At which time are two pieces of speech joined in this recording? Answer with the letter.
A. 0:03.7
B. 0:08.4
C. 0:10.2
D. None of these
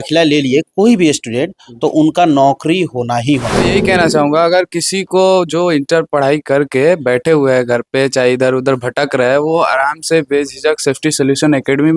A